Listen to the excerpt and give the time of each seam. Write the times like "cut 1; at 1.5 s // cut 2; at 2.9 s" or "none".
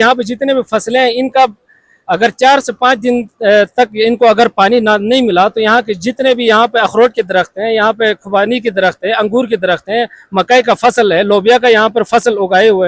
none